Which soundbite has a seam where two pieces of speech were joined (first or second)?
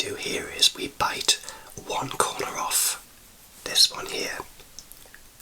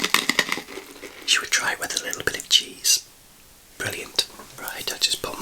second